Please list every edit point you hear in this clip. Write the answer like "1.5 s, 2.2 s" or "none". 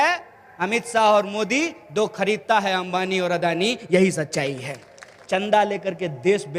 5.2 s